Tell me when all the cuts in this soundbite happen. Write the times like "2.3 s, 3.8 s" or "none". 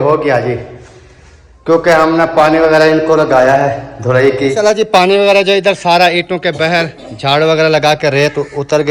4.5 s